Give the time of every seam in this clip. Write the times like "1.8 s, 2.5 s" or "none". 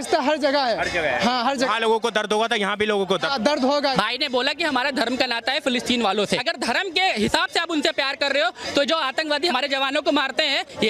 3.9 s, 6.4 s, 9.5 s

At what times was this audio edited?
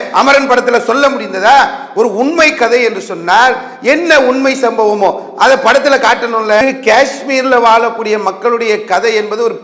6.6 s

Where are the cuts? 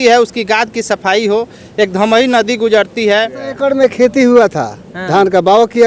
3.5 s

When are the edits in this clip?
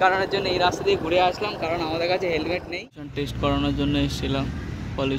3.1 s

